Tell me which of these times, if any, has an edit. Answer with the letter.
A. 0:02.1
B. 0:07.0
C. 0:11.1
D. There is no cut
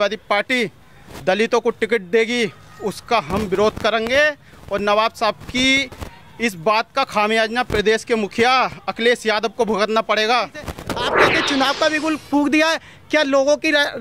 C